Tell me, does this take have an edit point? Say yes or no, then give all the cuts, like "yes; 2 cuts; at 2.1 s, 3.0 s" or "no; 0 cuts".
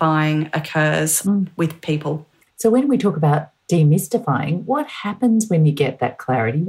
no; 0 cuts